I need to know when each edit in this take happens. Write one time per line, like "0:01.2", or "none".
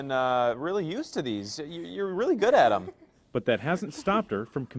none